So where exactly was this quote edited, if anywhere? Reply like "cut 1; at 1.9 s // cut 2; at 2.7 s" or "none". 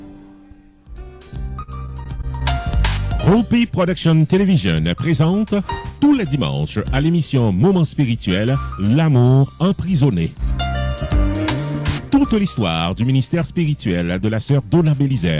cut 1; at 1.1 s